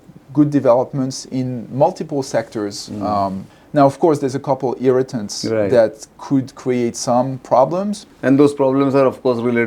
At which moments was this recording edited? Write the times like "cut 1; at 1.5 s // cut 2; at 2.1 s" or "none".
cut 1; at 3.4 s // cut 2; at 8.0 s